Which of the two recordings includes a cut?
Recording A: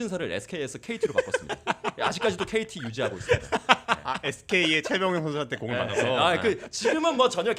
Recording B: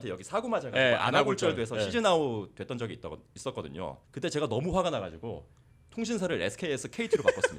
B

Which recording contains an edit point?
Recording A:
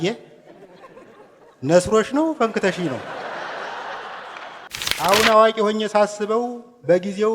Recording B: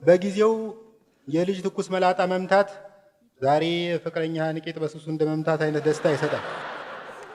A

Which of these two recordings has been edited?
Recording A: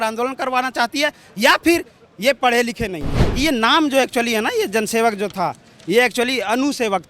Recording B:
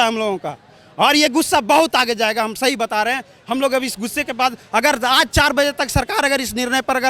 A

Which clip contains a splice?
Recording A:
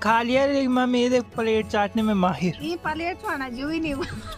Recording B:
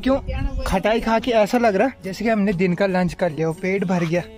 B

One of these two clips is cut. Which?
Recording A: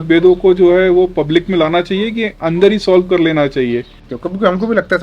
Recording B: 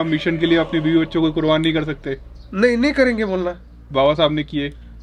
A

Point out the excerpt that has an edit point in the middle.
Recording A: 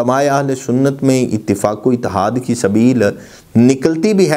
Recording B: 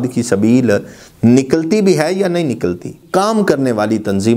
B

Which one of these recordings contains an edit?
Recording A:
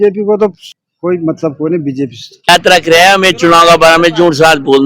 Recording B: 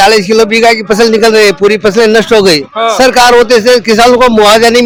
A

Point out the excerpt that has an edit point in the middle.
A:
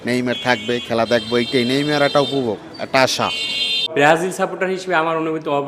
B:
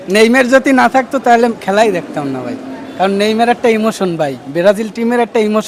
A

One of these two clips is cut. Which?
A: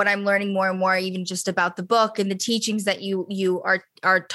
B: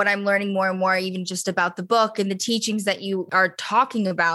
B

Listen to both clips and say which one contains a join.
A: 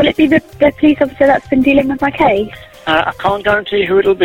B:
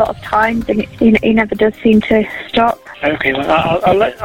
B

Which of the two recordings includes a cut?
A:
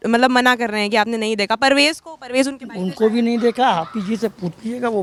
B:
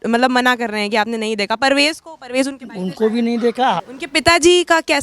B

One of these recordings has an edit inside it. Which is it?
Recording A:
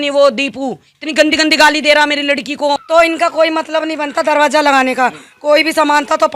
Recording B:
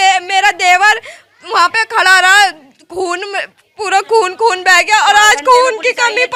A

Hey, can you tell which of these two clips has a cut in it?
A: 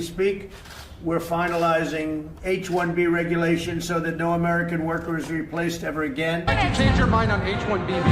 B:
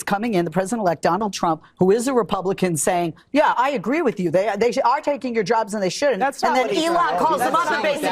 A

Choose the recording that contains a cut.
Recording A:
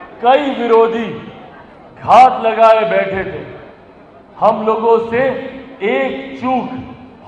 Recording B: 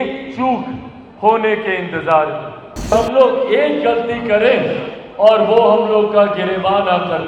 B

